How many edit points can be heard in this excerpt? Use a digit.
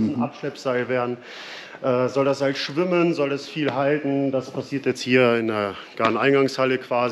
0